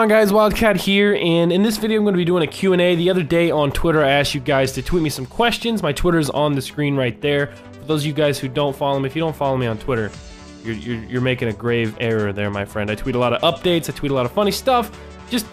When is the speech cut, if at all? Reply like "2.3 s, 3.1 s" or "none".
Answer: none